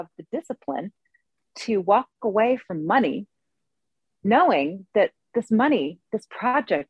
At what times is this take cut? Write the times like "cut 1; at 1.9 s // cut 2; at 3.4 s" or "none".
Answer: none

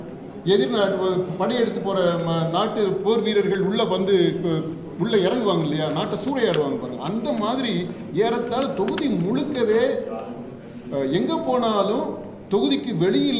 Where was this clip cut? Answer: none

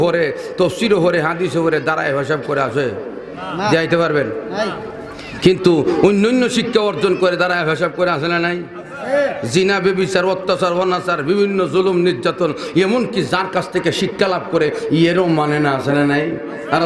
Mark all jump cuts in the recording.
none

